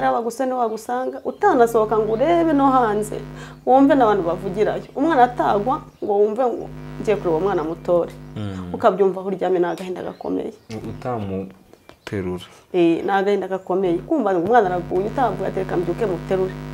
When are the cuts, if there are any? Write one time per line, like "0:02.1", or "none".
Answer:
none